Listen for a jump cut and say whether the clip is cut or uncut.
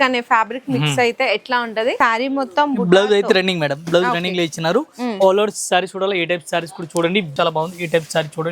cut